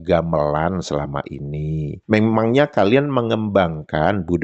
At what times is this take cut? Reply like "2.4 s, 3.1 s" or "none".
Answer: 2.0 s